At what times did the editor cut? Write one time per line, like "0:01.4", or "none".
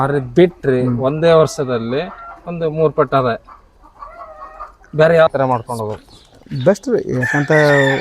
0:05.3